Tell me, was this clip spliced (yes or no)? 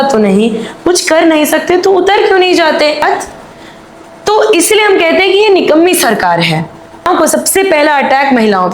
yes